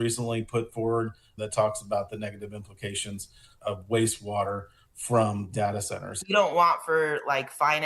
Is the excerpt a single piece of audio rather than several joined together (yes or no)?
no